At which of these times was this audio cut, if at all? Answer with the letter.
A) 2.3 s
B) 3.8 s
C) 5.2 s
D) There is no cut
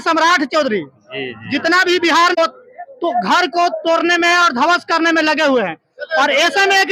A